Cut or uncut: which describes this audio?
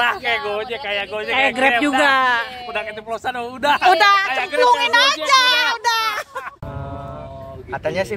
cut